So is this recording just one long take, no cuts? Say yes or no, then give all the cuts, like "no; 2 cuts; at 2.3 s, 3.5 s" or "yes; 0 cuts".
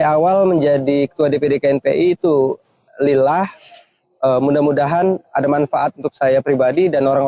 yes; 0 cuts